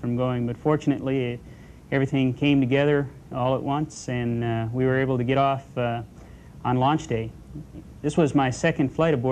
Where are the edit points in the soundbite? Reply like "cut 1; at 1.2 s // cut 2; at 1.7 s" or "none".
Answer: cut 1; at 4.0 s